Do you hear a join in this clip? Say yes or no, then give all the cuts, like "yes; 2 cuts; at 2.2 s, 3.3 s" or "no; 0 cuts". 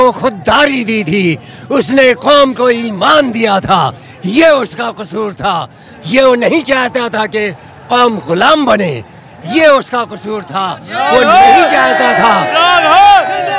no; 0 cuts